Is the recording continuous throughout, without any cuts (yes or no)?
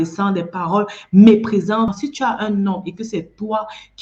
no